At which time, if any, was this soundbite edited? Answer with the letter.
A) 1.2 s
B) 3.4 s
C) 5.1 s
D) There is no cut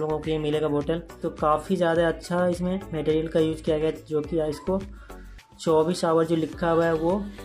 A